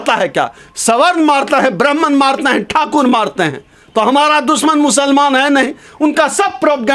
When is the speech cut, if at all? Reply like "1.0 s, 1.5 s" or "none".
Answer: none